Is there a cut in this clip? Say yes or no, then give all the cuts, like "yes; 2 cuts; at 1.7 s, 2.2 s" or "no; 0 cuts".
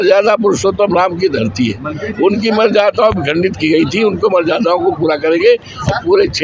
no; 0 cuts